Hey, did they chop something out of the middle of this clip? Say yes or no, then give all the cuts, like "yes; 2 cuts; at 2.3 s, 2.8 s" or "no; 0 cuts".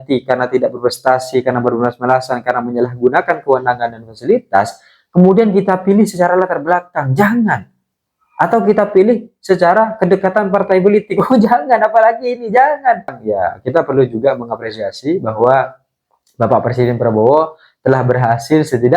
yes; 1 cut; at 13.2 s